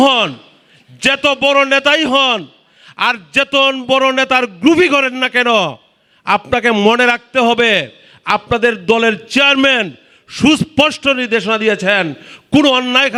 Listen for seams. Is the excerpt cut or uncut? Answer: uncut